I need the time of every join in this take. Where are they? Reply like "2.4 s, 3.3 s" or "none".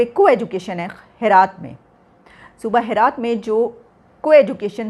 none